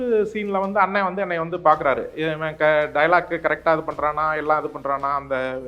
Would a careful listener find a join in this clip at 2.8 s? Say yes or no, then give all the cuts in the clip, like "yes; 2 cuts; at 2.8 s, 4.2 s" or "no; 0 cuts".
no; 0 cuts